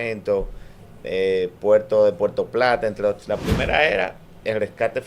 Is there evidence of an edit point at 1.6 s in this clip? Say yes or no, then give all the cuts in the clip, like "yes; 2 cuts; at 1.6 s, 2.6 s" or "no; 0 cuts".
no; 1 cut; at 3.2 s